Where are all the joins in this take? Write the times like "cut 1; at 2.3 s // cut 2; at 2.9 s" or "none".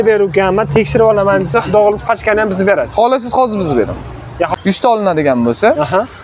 cut 1; at 4.5 s

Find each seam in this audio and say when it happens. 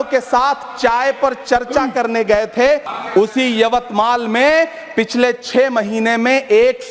cut 1; at 2.9 s

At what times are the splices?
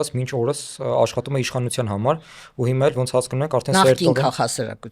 none

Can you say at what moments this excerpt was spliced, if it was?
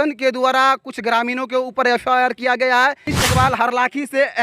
cut 1; at 3.1 s

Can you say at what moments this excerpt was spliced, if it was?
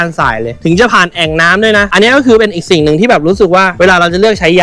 cut 1; at 1.9 s

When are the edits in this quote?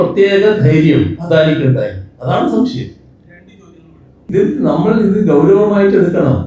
cut 1; at 4.3 s

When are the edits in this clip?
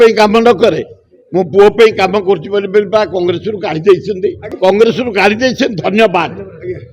cut 1; at 4.5 s

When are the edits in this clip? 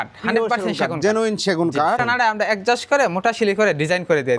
cut 1; at 2.0 s

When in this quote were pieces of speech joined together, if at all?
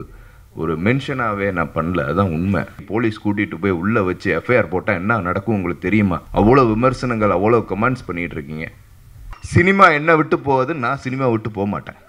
cut 1; at 2.8 s // cut 2; at 6.2 s // cut 3; at 9.3 s

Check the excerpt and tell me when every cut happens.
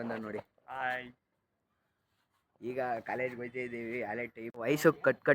cut 1; at 4.4 s

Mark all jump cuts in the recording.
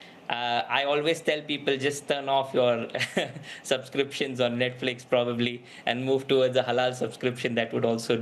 none

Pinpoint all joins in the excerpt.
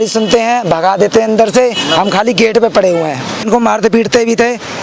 cut 1; at 3.5 s

